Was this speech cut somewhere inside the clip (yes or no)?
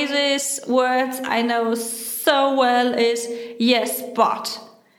no